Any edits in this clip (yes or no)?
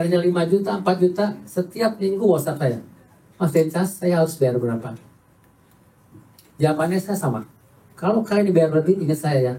no